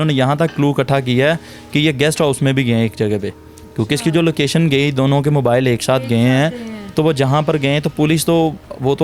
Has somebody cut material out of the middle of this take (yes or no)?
no